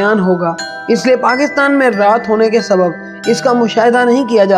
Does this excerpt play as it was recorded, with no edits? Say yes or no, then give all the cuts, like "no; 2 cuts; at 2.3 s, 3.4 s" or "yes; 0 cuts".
yes; 0 cuts